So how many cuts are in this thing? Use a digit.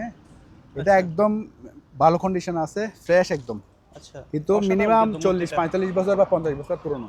0